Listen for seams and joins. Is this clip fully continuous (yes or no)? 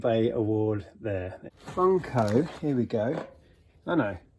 no